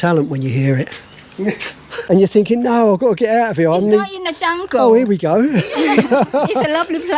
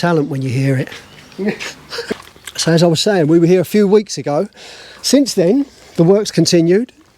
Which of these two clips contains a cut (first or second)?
first